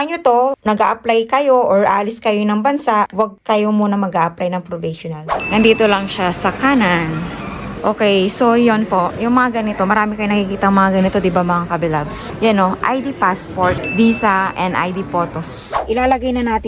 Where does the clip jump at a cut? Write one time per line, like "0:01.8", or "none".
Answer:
0:05.3
0:15.7